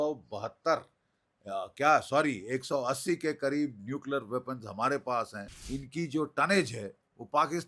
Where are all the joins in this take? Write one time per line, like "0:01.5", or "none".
0:05.6